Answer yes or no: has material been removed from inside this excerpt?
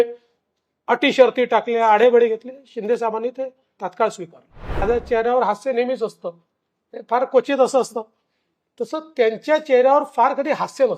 yes